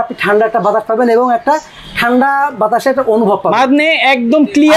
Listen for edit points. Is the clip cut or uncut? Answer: uncut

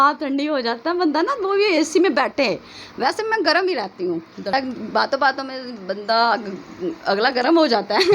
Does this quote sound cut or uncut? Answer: cut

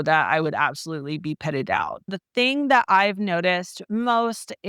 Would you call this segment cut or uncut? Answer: cut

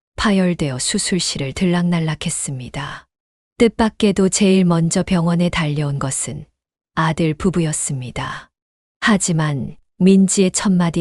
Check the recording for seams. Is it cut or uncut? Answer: uncut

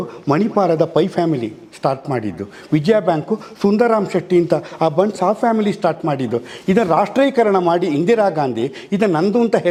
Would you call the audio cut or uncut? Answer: uncut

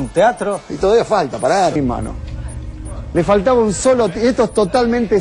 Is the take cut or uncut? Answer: uncut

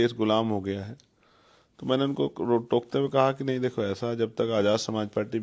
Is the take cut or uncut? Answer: uncut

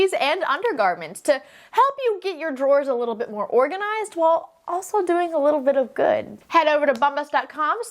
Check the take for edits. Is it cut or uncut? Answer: cut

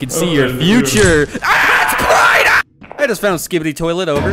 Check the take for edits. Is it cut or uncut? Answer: cut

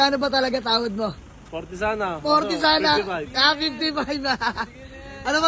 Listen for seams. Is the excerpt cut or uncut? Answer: uncut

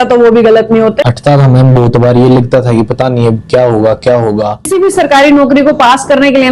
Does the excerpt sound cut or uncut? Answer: cut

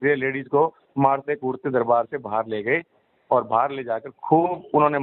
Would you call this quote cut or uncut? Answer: uncut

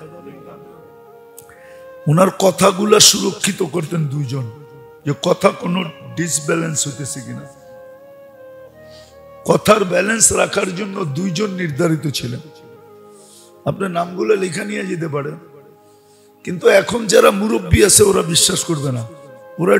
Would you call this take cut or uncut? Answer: uncut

